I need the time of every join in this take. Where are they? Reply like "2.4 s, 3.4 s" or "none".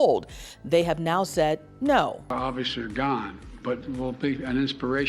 2.2 s